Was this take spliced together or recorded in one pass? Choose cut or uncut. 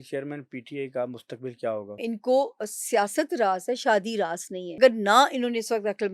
cut